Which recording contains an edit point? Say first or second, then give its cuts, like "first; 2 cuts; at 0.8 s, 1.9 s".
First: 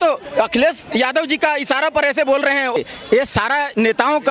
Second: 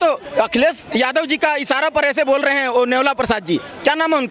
first; 1 cut; at 2.8 s